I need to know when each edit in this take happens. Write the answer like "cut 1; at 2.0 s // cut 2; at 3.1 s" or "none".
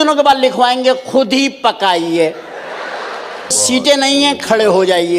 cut 1; at 3.6 s